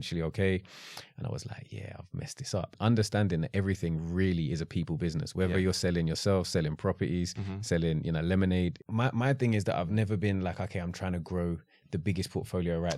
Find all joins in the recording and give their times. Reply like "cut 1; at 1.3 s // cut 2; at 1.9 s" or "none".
cut 1; at 2.7 s // cut 2; at 8.8 s